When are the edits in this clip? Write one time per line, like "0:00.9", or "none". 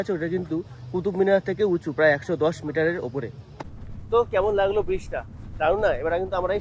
none